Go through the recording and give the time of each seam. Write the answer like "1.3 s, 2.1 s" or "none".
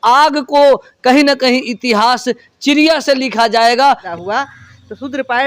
4.1 s